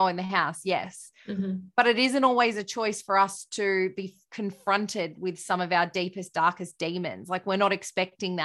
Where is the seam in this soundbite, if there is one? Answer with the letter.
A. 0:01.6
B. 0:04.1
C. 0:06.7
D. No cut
D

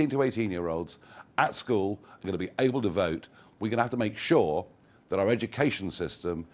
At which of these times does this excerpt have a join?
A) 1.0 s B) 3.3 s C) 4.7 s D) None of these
D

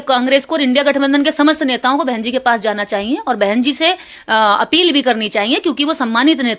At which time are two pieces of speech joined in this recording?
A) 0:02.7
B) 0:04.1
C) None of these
C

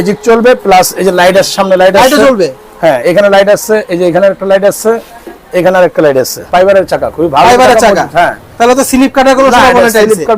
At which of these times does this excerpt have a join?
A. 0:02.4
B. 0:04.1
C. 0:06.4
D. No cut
C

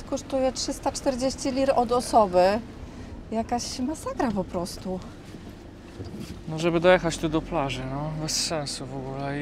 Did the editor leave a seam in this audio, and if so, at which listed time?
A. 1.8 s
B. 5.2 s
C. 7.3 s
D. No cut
D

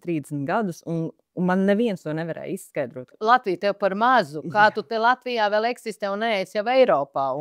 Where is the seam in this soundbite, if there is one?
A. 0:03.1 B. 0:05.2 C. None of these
A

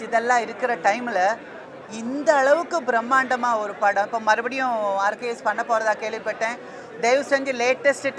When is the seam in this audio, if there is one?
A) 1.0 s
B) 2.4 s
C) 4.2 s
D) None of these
D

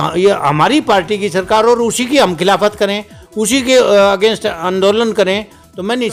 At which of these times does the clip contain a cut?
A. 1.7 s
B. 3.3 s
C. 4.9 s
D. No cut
D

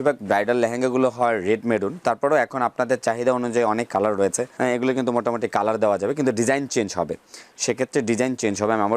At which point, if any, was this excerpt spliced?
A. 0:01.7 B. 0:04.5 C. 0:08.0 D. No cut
B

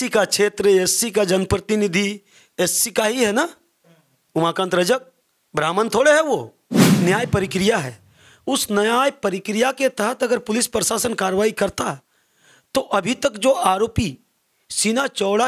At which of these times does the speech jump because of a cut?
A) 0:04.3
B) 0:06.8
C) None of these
B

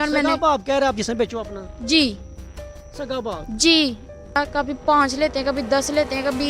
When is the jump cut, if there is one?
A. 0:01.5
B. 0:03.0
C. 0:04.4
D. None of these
C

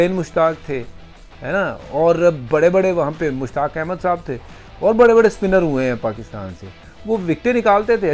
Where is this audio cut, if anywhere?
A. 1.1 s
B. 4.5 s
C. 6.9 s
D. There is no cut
D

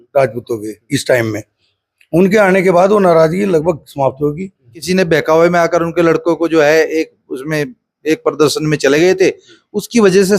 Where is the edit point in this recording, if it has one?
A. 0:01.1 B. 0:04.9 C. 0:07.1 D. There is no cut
B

